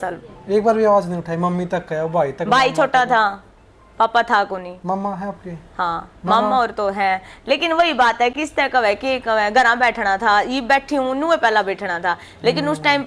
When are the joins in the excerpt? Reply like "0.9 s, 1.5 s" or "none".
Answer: none